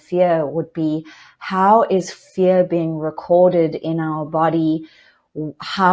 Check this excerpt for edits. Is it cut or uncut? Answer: uncut